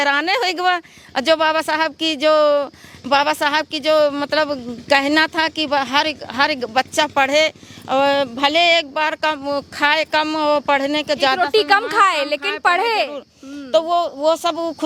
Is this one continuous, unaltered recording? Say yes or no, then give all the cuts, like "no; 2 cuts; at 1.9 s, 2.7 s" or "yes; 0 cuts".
yes; 0 cuts